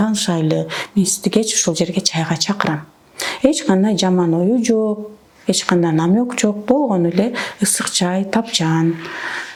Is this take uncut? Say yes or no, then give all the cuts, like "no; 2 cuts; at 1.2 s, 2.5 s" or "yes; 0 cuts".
yes; 0 cuts